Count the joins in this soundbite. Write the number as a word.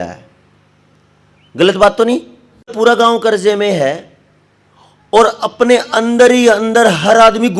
one